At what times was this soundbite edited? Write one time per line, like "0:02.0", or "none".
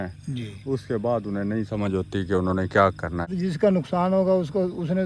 0:03.3